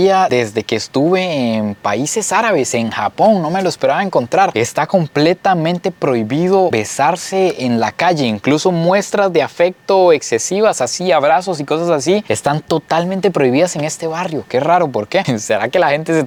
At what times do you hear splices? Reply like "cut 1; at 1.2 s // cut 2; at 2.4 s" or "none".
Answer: none